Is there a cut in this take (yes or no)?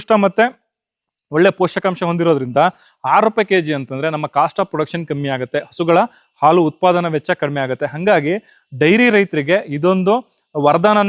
no